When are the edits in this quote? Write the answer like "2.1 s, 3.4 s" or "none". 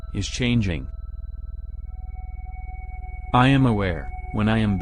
1.1 s, 3.3 s

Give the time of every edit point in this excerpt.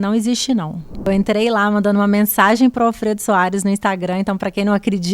1.1 s

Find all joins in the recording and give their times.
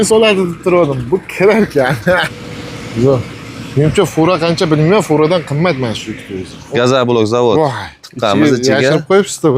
2.3 s, 6.8 s

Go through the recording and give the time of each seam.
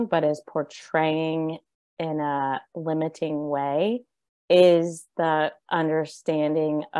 none

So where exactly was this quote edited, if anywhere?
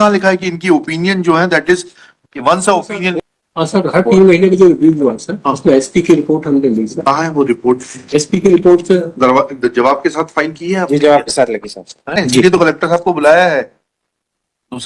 3.2 s, 12.2 s

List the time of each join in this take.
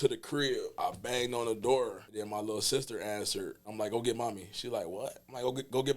0.8 s, 2.0 s, 3.6 s

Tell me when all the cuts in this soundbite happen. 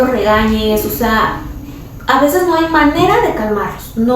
none

